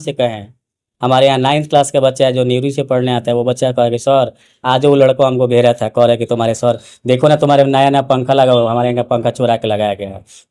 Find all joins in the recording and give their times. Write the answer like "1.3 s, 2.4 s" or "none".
none